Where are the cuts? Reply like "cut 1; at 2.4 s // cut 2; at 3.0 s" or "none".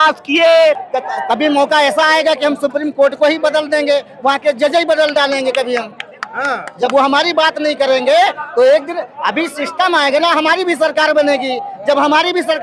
cut 1; at 0.9 s